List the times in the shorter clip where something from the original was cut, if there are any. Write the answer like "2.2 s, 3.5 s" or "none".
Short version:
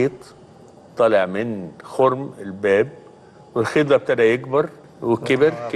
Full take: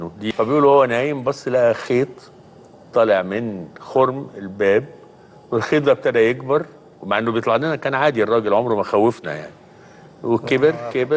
4.8 s